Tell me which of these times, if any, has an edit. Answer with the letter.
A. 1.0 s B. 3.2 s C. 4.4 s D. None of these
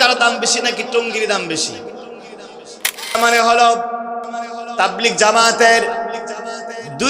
B